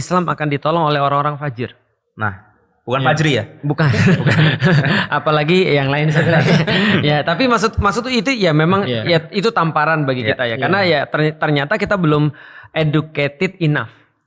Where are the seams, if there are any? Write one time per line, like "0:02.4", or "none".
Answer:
none